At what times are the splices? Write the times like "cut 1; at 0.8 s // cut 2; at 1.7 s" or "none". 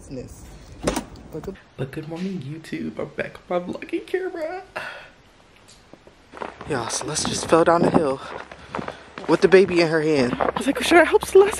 cut 1; at 1.6 s // cut 2; at 6.2 s // cut 3; at 10.3 s